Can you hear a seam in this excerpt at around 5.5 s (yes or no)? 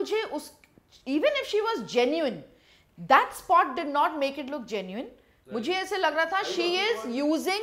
no